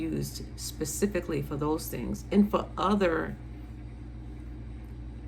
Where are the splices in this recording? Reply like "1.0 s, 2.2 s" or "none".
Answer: none